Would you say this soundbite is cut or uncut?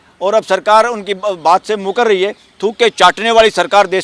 uncut